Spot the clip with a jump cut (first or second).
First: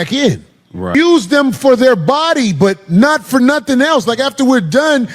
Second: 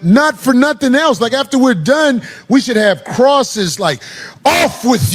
first